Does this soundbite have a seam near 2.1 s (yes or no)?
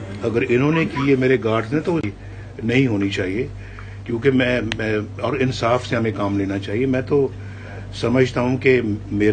yes